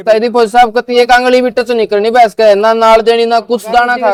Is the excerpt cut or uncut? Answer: uncut